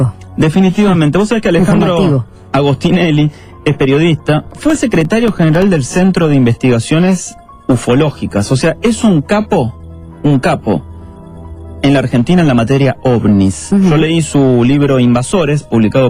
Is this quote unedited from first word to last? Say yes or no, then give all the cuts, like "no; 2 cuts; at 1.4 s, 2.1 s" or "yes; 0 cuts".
no; 1 cut; at 3.0 s